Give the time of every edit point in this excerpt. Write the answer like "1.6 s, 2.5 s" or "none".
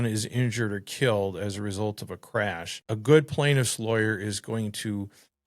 2.7 s